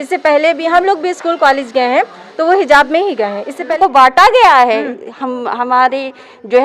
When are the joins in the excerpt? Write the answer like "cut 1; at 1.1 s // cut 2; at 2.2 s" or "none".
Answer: cut 1; at 3.7 s